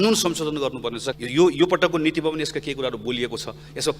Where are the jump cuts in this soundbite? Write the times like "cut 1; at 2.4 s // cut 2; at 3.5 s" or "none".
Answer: none